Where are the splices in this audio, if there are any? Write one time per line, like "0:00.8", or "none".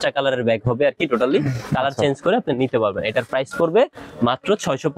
none